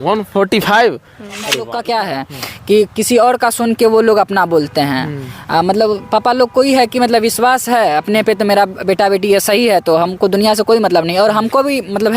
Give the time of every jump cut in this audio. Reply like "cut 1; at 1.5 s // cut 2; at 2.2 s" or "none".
cut 1; at 1.6 s